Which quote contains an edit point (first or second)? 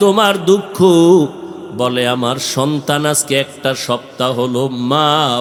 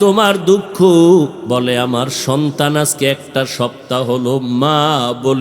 second